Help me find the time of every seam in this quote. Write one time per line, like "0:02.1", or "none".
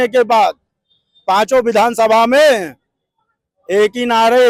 none